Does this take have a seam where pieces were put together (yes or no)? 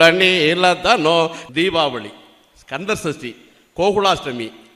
yes